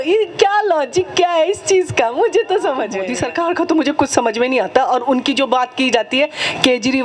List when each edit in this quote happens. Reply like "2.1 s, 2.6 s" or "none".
3.1 s